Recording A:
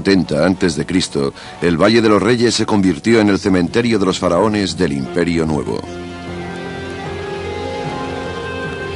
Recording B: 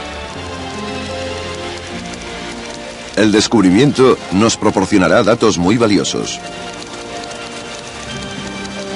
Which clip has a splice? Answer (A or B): B